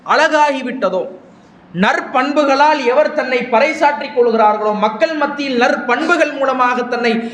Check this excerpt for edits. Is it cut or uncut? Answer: uncut